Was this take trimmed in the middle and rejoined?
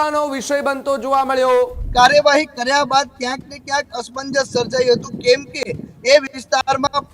yes; 1 cut; at 1.8 s

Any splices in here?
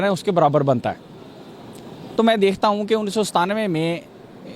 no; 0 cuts

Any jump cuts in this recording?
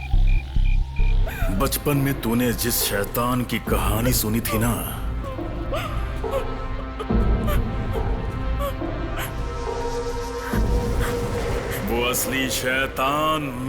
yes; 1 cut; at 1.3 s

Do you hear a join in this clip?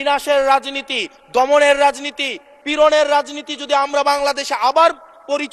no; 0 cuts

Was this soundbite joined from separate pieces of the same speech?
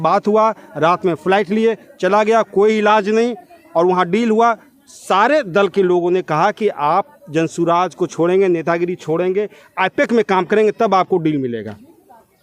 no; 0 cuts

